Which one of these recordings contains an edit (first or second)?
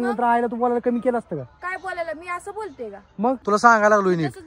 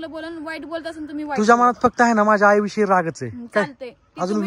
first